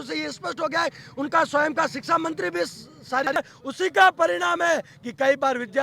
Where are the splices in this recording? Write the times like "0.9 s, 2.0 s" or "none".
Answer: 3.4 s